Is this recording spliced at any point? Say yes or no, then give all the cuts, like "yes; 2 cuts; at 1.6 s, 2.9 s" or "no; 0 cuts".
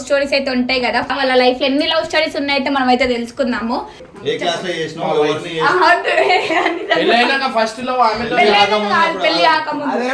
yes; 2 cuts; at 1.1 s, 3.9 s